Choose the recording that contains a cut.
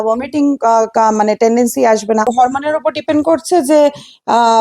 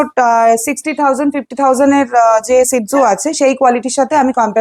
first; 1 cut; at 2.3 s

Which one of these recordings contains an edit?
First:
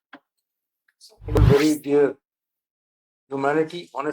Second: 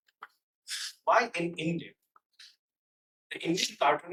first; 1 cut; at 1.4 s

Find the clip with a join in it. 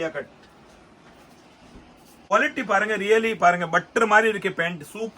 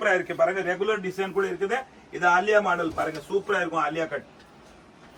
first; 1 cut; at 2.3 s

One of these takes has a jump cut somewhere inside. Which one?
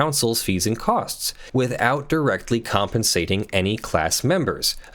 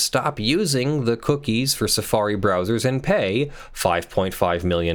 first; 1 cut; at 1.3 s

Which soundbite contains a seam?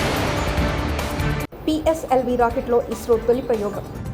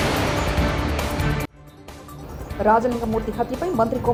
first; 1 cut; at 1.5 s

